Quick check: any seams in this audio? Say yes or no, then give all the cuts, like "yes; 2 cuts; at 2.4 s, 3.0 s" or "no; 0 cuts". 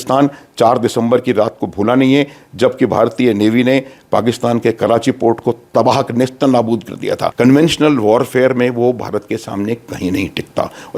yes; 1 cut; at 7.3 s